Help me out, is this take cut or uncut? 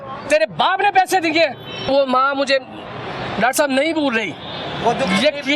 cut